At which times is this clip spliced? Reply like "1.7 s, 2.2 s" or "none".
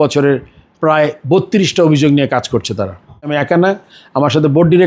3.3 s